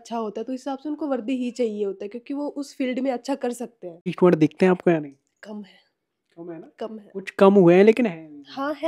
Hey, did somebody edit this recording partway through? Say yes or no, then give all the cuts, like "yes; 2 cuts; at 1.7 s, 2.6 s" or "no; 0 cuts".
yes; 1 cut; at 4.1 s